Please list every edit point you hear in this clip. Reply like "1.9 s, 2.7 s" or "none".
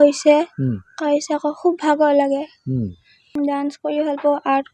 3.3 s